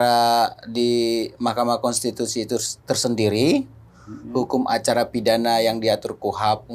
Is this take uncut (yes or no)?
yes